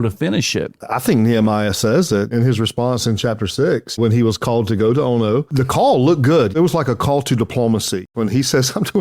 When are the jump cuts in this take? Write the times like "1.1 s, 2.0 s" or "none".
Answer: 0.8 s, 2.3 s, 4.0 s, 5.5 s, 6.6 s, 8.1 s